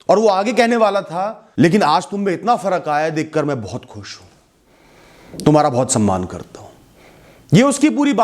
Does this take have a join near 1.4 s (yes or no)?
yes